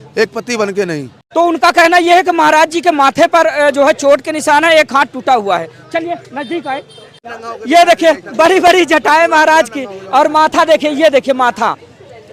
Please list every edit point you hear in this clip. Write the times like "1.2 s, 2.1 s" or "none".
none